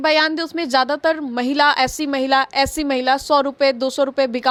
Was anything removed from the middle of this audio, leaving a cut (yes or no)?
no